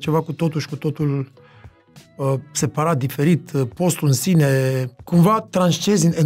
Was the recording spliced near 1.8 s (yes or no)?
no